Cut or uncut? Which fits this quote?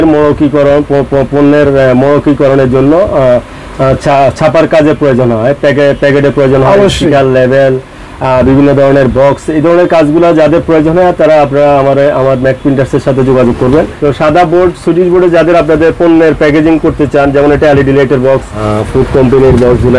cut